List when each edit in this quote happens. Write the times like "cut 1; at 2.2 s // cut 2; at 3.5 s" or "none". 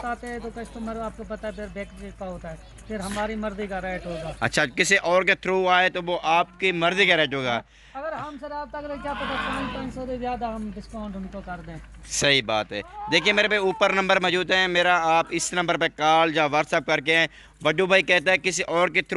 none